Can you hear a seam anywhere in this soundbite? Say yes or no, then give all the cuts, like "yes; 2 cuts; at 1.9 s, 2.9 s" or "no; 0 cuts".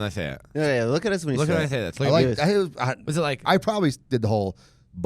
yes; 1 cut; at 3.4 s